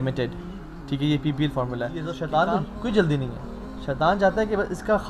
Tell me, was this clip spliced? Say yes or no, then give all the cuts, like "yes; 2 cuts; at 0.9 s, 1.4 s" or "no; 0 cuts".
yes; 1 cut; at 2.1 s